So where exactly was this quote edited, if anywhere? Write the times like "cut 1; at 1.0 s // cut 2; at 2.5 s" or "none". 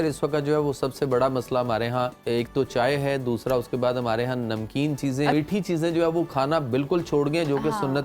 cut 1; at 2.2 s // cut 2; at 5.3 s